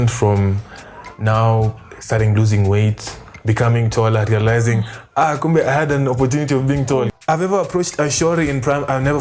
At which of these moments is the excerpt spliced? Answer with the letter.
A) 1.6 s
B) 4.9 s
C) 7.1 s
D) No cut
C